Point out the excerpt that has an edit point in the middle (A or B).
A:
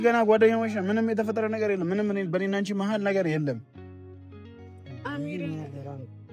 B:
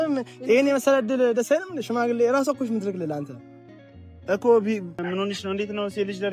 B